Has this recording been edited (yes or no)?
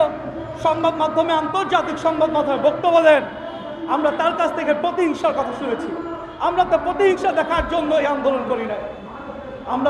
no